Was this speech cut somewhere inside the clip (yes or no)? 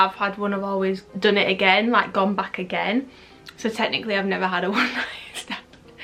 no